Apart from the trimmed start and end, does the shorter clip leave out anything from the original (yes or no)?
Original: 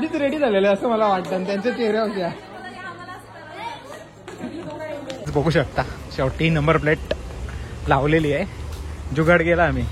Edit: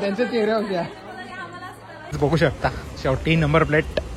yes